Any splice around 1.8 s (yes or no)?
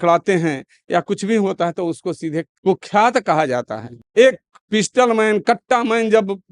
no